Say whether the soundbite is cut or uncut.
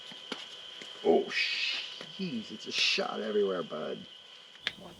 uncut